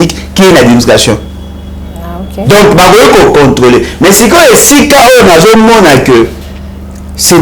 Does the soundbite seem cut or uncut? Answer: uncut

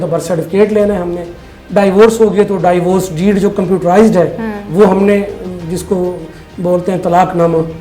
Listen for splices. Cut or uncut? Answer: uncut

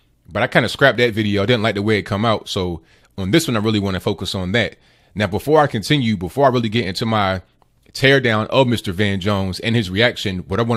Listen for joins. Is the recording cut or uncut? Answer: uncut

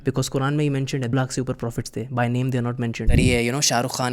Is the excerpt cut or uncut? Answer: cut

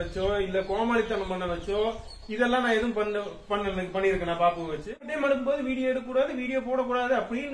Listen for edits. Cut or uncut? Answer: cut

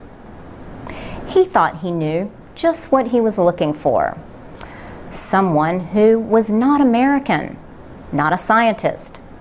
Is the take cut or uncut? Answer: cut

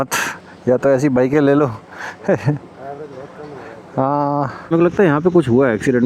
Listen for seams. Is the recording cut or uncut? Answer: cut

